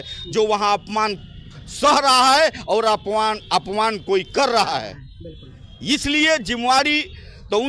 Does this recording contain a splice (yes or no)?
no